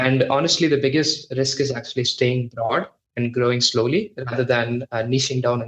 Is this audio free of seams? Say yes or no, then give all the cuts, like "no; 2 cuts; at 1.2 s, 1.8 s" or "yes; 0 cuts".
yes; 0 cuts